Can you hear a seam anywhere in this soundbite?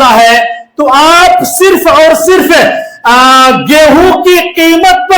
no; 0 cuts

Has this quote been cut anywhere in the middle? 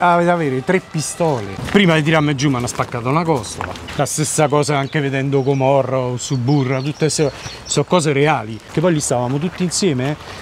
yes; 3 cuts; at 1.5 s, 3.8 s, 8.6 s

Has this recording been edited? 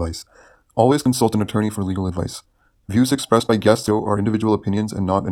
yes; 1 cut; at 3.8 s

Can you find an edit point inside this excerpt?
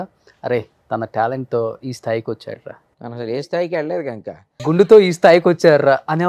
yes; 2 cuts; at 3.3 s, 4.5 s

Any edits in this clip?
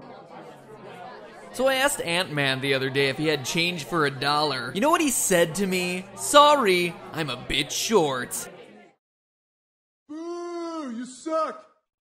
no; 0 cuts

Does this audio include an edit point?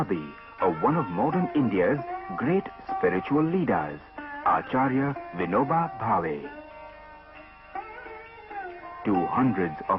yes; 1 cut; at 7.3 s

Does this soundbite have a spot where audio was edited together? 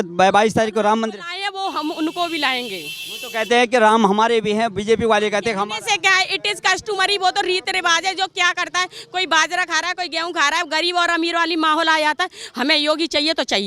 no; 0 cuts

